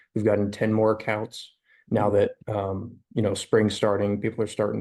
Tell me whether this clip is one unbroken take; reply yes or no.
yes